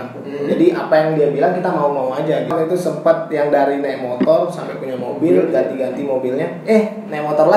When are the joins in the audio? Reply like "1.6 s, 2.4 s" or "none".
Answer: 2.5 s